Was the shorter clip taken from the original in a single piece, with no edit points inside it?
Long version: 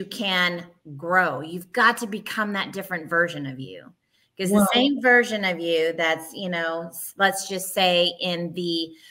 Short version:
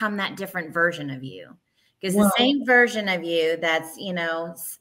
yes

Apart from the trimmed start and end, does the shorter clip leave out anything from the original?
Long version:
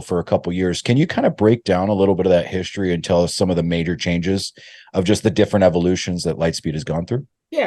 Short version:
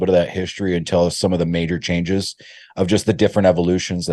no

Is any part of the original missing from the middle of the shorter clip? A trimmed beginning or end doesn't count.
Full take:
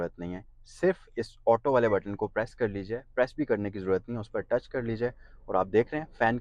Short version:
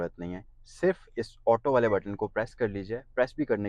no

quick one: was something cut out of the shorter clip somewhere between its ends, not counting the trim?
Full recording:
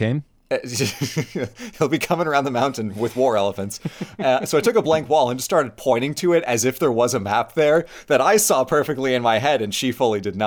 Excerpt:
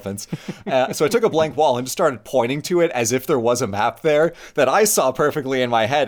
no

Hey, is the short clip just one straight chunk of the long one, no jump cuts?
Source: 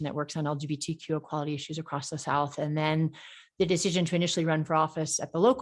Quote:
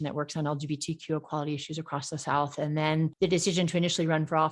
no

